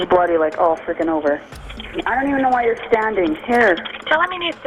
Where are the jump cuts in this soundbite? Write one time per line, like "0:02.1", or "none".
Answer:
0:01.4